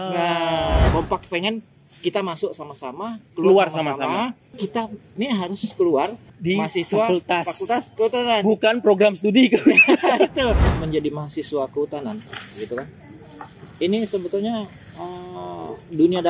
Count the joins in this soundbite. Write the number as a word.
four